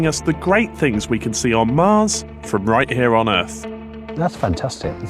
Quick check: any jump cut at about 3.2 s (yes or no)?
yes